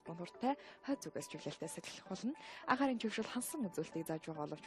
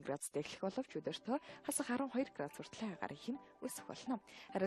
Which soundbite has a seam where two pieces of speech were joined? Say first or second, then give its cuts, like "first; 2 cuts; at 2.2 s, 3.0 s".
first; 1 cut; at 3.0 s